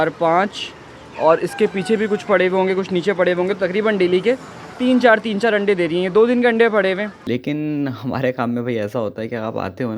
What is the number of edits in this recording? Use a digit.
1